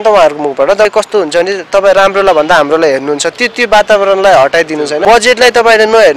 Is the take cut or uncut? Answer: cut